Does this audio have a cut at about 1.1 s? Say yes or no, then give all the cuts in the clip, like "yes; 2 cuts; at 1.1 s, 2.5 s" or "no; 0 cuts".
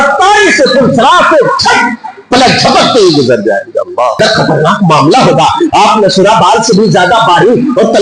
no; 1 cut; at 4.2 s